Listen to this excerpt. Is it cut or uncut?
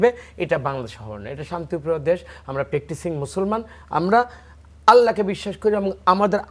uncut